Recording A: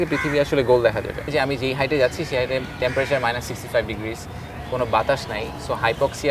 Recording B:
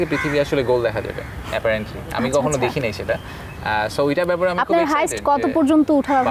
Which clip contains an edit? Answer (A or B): A